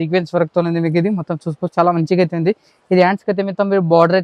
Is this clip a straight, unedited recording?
yes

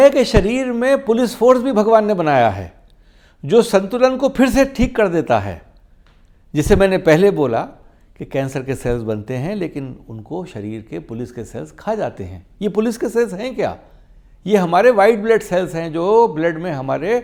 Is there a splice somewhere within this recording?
no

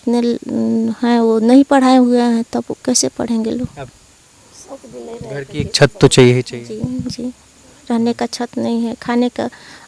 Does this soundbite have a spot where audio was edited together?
yes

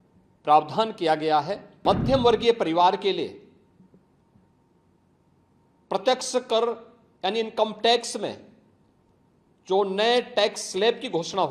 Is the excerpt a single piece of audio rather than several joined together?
no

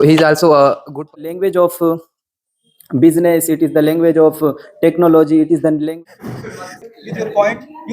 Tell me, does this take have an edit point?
yes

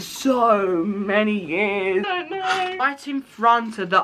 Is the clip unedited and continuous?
no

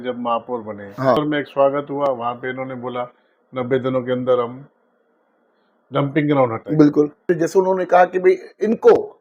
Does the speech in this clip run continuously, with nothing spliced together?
no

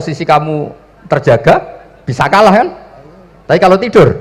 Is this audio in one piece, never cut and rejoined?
yes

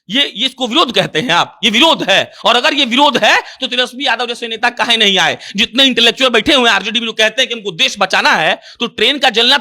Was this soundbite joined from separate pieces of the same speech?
no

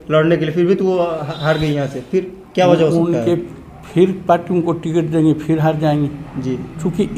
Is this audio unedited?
yes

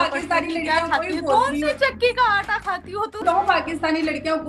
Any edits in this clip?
yes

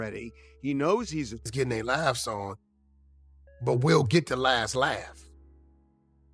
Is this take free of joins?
no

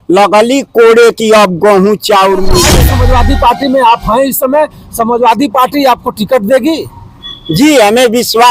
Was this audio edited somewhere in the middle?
yes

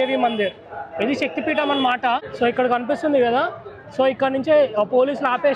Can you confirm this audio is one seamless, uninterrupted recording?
no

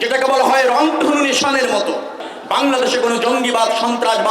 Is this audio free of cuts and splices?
no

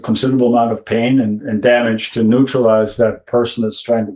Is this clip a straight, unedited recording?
yes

